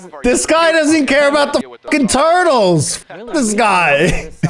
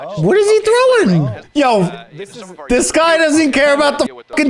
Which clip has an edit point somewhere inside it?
second; 1 cut; at 1.4 s

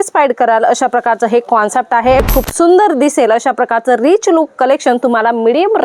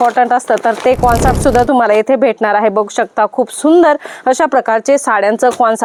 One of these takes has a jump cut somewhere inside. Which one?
first; 1 cut; at 2.2 s

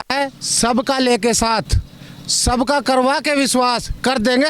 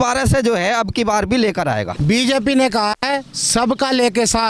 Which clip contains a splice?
second; 1 cut; at 1.9 s

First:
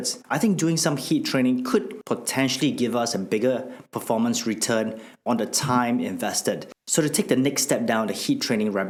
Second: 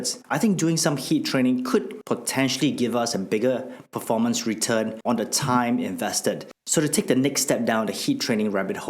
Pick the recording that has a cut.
second; 1 cut; at 5.0 s

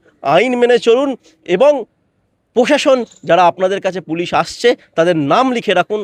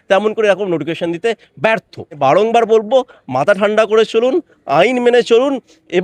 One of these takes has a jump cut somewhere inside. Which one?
second; 1 cut; at 2.2 s

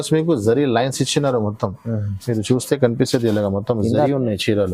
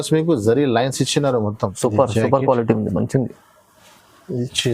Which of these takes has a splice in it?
second; 1 cut; at 1.7 s

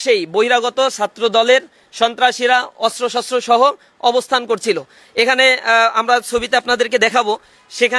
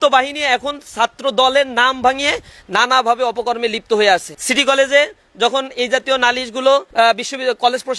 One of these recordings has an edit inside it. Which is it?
second; 2 cuts; at 4.4 s, 6.9 s

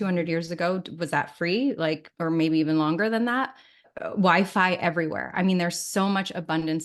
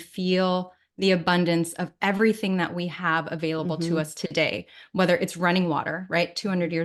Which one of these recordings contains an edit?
first; 2 cuts; at 2.1 s, 3.9 s

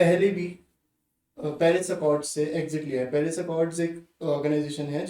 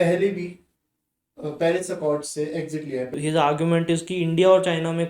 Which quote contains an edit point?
second; 1 cut; at 3.1 s

